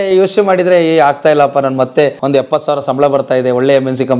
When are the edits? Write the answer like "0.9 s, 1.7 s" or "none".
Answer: 2.2 s